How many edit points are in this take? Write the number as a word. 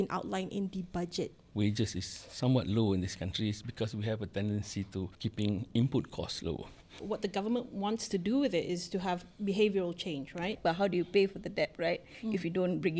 four